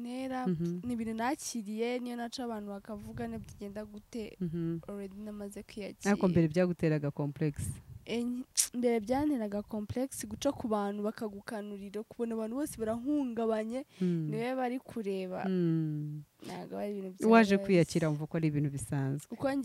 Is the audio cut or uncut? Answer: uncut